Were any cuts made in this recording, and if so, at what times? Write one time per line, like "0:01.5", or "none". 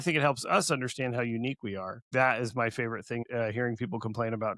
0:02.1
0:03.3

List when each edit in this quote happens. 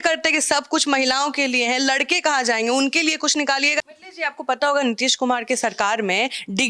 0:04.0

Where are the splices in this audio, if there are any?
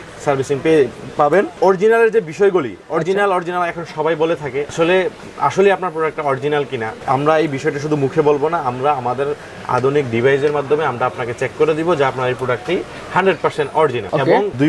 none

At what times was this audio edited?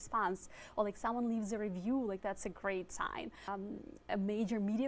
0:03.5

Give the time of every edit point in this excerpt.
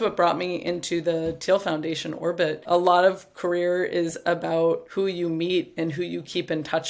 0:02.6
0:04.9

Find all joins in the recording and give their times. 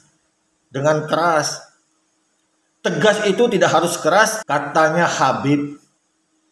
0:04.4

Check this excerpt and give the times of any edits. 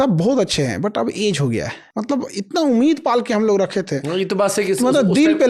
0:01.8

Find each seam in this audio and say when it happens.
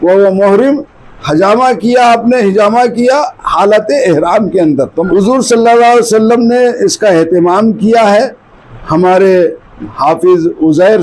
0:05.1

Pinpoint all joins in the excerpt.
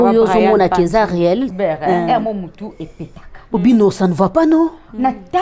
0:01.5

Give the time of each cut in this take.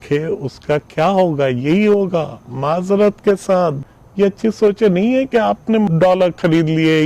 0:03.8
0:05.9

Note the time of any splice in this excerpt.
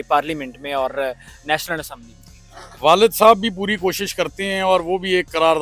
none

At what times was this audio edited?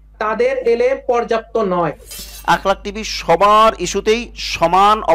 0:02.3

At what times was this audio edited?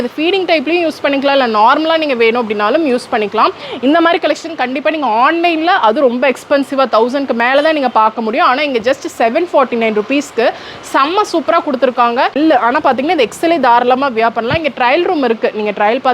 0:12.4

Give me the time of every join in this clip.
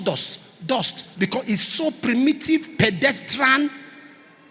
0:01.0

